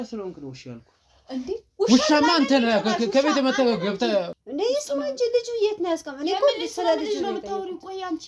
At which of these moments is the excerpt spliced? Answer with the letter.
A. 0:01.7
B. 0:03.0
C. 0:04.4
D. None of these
C